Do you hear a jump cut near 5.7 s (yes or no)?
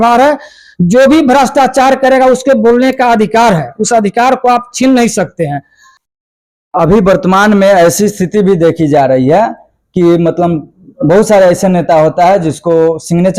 no